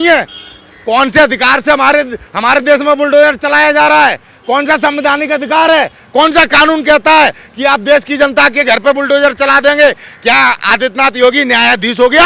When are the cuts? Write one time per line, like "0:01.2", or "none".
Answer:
none